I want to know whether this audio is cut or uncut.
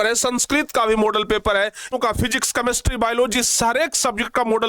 cut